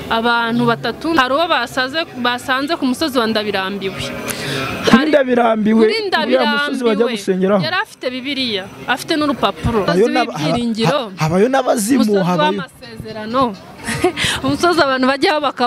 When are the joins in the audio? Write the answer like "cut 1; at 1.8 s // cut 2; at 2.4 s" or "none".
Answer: cut 1; at 1.2 s // cut 2; at 9.9 s

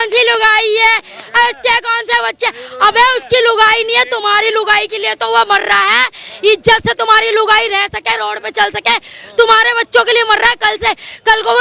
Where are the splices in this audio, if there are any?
none

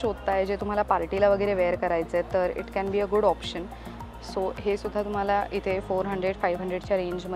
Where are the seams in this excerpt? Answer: none

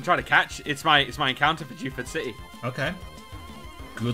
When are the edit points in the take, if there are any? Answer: cut 1; at 2.5 s

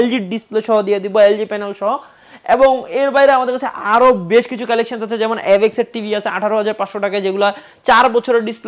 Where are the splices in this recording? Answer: none

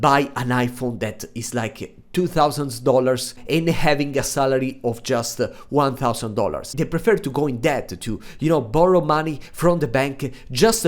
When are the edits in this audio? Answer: cut 1; at 3.4 s // cut 2; at 6.7 s

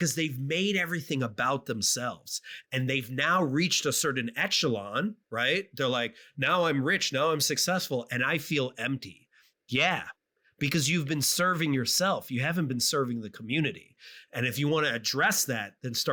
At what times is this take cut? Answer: none

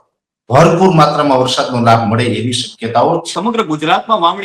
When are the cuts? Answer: cut 1; at 3.3 s

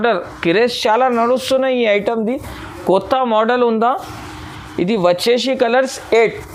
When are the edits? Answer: none

